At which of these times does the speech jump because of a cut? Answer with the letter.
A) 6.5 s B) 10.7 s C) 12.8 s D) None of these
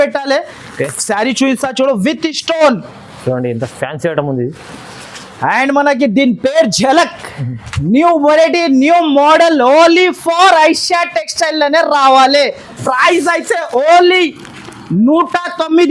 C